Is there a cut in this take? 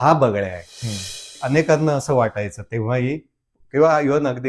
yes; 1 cut; at 1.4 s

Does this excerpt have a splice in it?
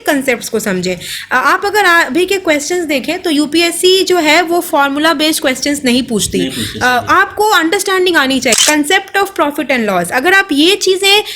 yes; 1 cut; at 8.6 s

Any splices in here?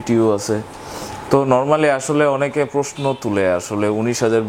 no; 0 cuts

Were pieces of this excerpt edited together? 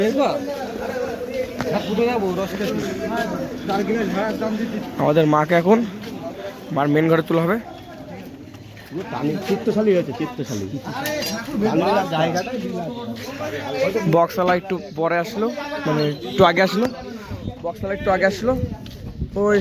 no; 0 cuts

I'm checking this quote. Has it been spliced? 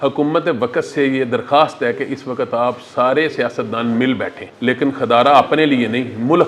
yes; 1 cut; at 4.4 s

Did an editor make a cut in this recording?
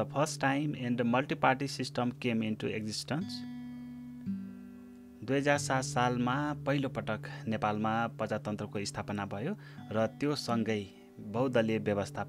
yes; 2 cuts; at 3.3 s, 5.1 s

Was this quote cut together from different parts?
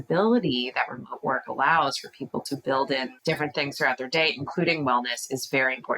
yes; 1 cut; at 3.1 s

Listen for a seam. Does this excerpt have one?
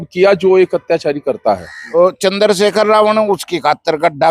yes; 1 cut; at 2.0 s

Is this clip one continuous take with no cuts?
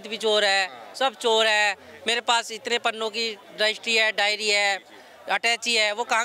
no; 1 cut; at 3.4 s

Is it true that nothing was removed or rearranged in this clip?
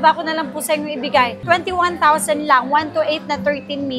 yes; 0 cuts

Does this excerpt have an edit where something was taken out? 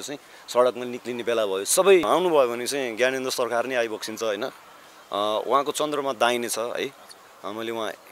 yes; 1 cut; at 2.1 s

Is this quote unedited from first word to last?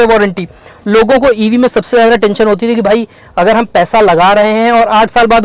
yes; 0 cuts

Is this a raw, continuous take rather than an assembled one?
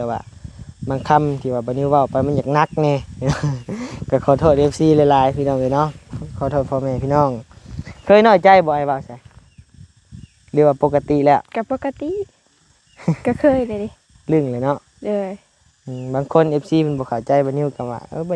yes; 0 cuts

